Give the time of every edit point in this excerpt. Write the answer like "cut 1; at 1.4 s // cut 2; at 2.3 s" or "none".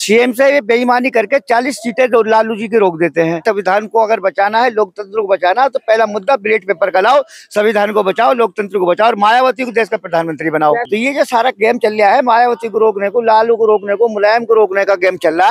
cut 1; at 3.4 s // cut 2; at 10.8 s